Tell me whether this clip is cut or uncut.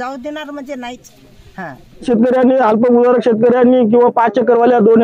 cut